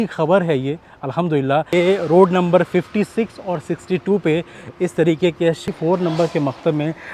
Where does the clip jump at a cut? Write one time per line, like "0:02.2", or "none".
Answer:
0:01.7
0:05.6